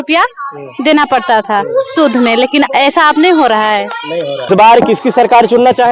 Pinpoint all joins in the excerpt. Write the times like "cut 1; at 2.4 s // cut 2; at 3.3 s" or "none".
cut 1; at 4.5 s